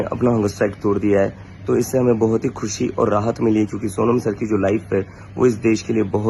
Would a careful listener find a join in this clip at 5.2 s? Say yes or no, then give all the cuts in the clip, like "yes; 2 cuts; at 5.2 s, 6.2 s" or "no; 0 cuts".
no; 0 cuts